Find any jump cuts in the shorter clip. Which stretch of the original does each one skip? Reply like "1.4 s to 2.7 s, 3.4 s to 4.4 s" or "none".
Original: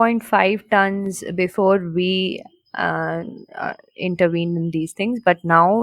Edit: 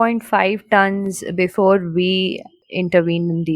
2.6 s to 3.8 s